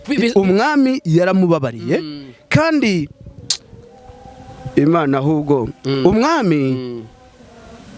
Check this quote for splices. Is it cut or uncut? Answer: uncut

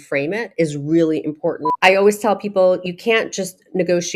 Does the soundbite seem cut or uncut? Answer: cut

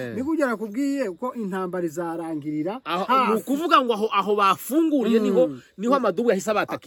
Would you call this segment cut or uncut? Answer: uncut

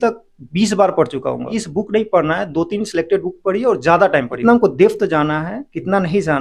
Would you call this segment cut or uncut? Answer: cut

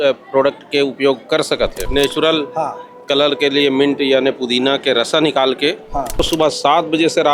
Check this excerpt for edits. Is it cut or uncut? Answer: cut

